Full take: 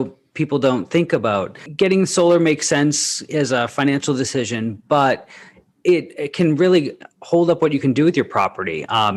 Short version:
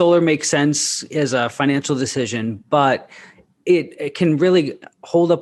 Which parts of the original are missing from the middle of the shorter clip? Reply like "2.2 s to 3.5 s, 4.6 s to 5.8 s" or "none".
none